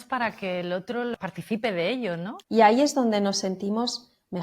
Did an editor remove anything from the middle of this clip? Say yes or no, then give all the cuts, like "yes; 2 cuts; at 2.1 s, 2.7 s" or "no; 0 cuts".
yes; 2 cuts; at 1.1 s, 2.3 s